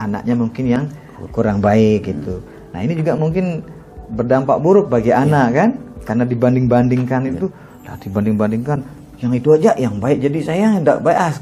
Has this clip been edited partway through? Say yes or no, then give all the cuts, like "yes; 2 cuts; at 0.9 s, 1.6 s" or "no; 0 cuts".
no; 0 cuts